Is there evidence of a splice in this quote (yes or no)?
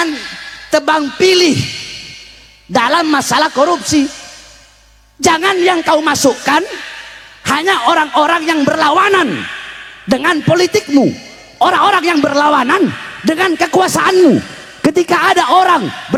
no